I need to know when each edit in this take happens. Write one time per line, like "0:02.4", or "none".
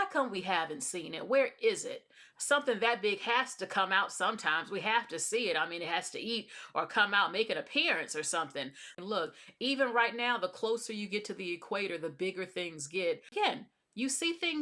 0:08.9
0:13.3